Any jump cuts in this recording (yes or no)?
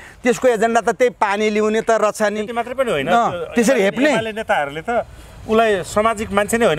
no